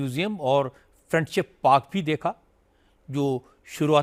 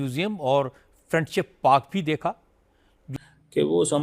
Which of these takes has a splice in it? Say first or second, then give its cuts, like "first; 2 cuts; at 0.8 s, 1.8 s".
second; 1 cut; at 3.1 s